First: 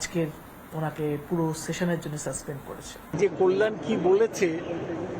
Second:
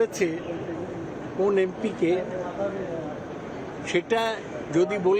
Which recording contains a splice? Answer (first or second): first